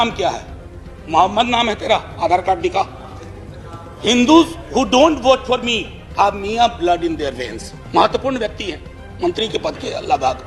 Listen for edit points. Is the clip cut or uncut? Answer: uncut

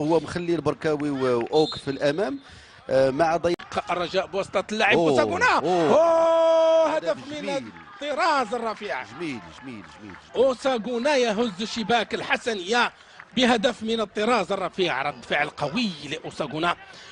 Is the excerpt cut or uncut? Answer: uncut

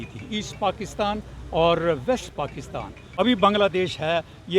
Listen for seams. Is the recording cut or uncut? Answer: cut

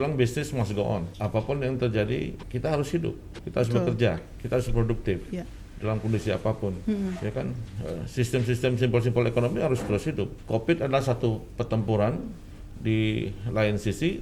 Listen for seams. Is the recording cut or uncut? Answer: cut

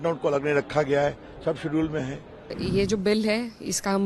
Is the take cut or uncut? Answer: cut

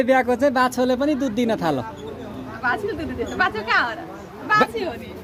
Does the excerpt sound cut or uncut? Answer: uncut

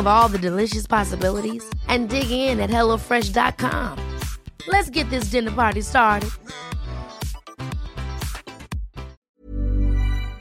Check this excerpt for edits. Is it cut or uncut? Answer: cut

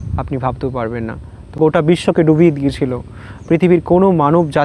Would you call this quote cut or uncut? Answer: cut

